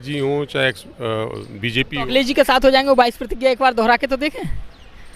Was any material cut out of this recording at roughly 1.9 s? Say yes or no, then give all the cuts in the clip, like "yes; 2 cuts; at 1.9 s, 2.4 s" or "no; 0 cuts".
yes; 1 cut; at 1.9 s